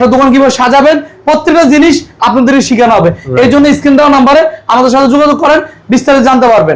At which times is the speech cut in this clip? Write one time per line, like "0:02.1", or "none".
none